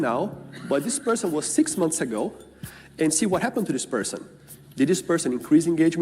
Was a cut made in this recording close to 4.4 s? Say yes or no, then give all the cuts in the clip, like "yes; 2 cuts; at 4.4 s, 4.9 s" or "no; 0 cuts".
no; 0 cuts